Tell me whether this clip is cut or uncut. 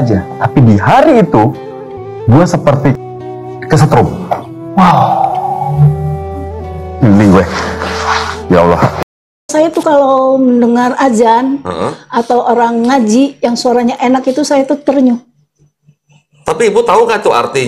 cut